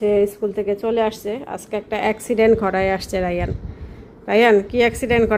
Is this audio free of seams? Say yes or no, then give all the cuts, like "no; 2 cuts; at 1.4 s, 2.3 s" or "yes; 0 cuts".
yes; 0 cuts